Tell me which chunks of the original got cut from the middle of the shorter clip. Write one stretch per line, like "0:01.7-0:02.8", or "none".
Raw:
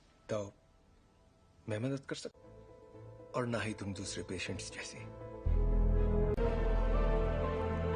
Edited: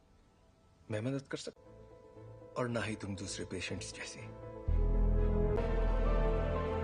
0:06.4-0:06.5